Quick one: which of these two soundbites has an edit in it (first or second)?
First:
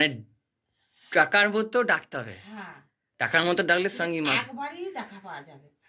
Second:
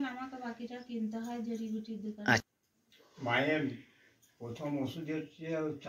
second